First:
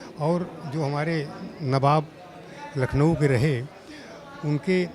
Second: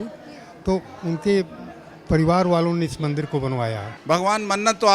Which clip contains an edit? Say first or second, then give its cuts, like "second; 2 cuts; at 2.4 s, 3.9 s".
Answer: second; 1 cut; at 3.9 s